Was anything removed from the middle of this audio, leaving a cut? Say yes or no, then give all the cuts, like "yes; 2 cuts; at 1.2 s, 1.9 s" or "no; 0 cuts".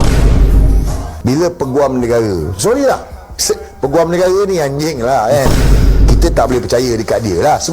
yes; 1 cut; at 1.1 s